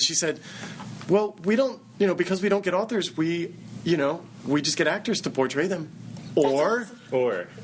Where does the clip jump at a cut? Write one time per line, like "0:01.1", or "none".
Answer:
none

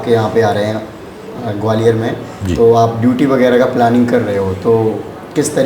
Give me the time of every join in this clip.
none

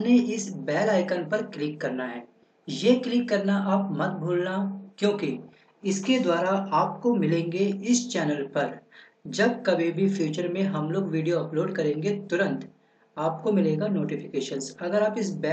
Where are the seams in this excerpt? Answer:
0:04.8

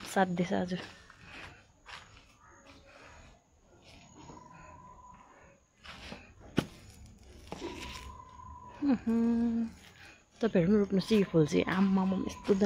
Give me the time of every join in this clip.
none

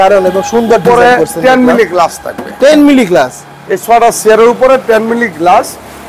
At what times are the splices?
none

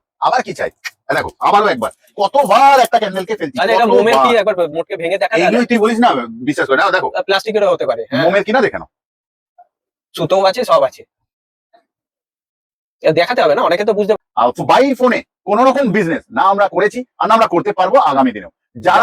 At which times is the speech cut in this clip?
0:14.1

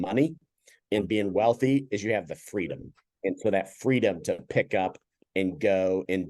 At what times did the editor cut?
0:03.0

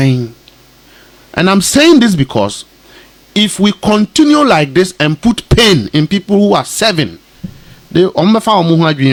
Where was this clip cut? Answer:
none

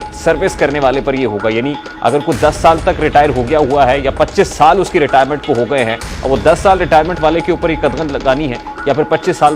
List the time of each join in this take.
none

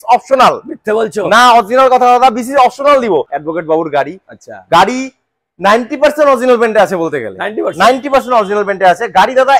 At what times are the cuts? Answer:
0:03.3

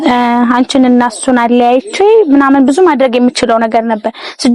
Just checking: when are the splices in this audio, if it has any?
none

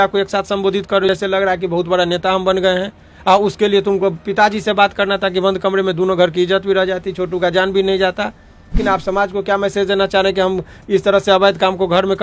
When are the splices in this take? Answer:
0:01.1
0:08.8

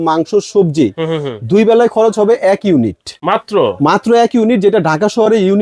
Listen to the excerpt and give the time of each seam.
none

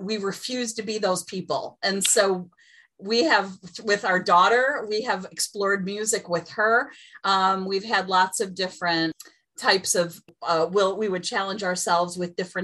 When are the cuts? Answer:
0:09.2
0:10.3

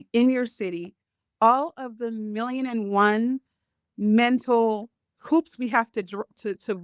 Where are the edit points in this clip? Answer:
none

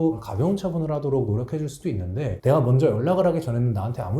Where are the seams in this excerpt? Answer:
0:02.4

